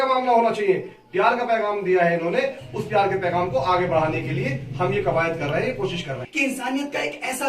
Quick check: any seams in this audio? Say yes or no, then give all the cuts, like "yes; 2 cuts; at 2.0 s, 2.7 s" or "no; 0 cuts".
yes; 1 cut; at 6.2 s